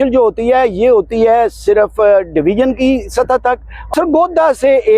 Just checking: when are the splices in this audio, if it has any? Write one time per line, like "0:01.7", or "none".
0:03.9

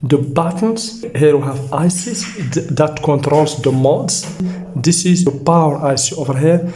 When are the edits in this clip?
0:01.1
0:04.5

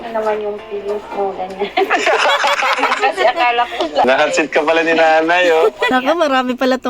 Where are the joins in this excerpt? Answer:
0:04.1
0:05.9

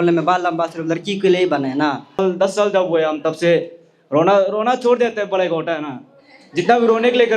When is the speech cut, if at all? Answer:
0:02.2

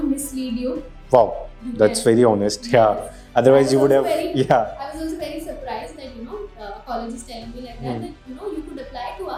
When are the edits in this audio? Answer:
none

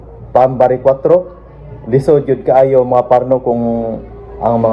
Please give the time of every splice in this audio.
none

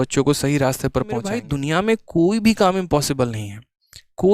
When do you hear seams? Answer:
0:01.5

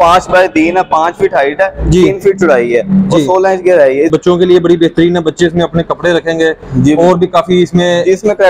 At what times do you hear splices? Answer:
0:04.1

